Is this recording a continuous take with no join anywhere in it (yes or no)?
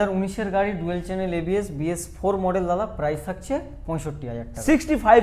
yes